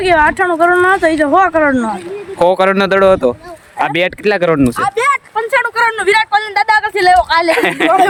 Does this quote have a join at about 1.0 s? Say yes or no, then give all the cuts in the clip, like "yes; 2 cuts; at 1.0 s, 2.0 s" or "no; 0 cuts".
no; 0 cuts